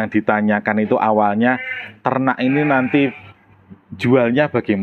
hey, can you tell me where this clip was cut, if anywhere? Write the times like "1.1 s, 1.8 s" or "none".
none